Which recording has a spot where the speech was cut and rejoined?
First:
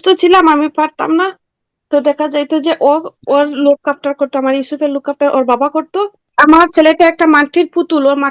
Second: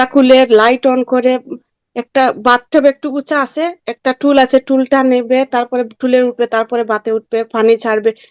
first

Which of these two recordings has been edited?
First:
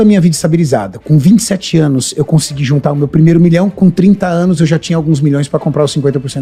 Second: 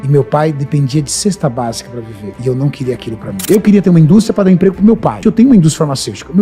second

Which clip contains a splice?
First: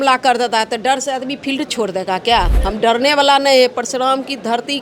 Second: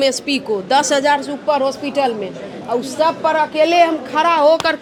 first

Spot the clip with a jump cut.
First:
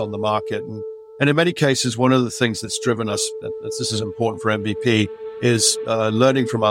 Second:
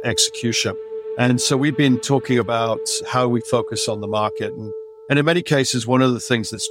second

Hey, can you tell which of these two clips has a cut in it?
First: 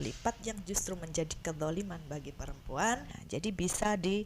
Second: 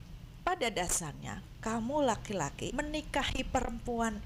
first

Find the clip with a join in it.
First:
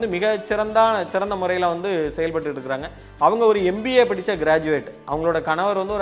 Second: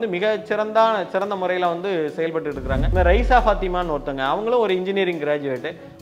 second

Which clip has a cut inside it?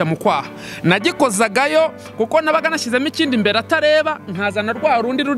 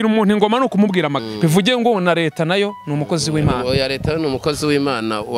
second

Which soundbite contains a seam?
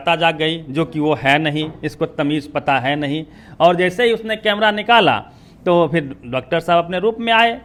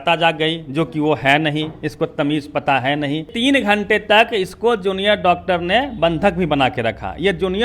second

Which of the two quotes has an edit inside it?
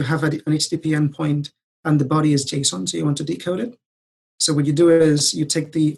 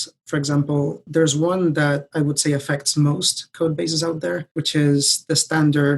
second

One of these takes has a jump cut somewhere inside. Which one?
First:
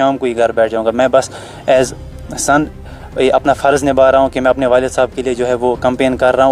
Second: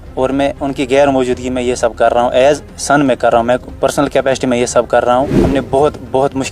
second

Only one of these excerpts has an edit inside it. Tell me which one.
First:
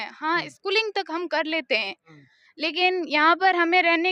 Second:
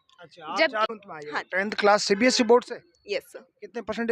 second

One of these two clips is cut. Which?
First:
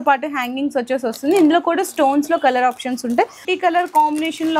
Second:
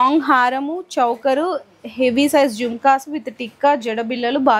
first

